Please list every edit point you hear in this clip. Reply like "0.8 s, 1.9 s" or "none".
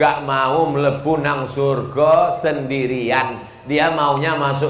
none